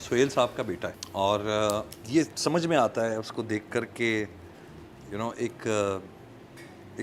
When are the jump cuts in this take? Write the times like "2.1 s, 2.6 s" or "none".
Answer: 1.0 s, 2.0 s

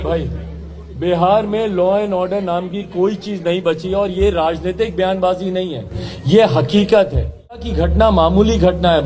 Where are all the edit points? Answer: 7.8 s

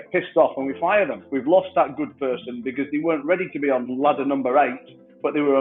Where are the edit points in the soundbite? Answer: 1.2 s, 3.9 s

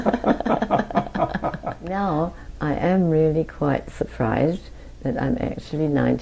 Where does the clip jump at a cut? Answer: 1.9 s

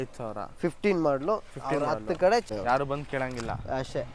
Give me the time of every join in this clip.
2.5 s

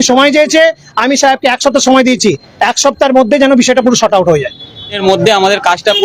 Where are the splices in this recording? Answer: 5.0 s

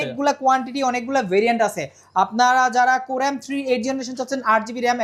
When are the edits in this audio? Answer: none

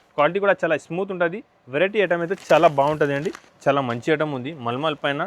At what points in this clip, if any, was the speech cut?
3.4 s

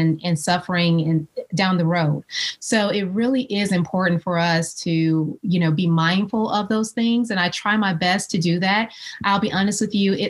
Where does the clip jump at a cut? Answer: none

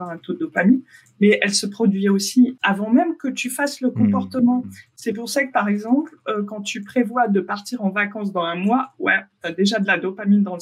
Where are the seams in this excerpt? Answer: 2.5 s

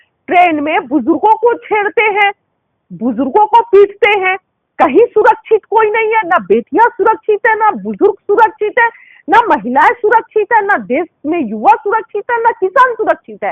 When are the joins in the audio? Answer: none

